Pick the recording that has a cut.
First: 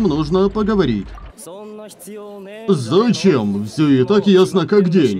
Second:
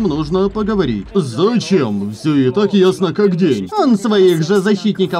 second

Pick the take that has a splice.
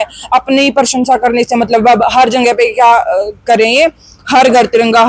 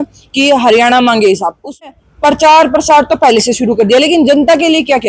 second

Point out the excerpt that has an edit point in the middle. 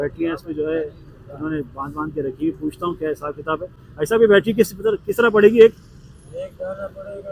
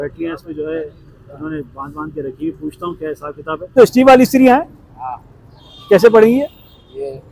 second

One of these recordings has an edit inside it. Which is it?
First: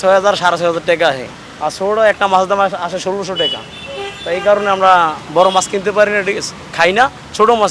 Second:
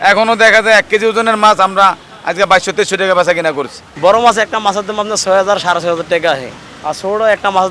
second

